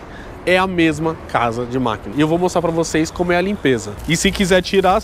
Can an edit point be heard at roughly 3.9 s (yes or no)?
yes